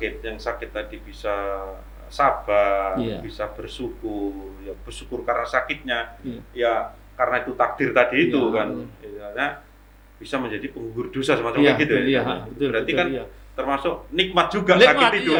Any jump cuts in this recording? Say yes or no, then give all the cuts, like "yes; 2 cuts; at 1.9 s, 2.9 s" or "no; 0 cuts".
no; 0 cuts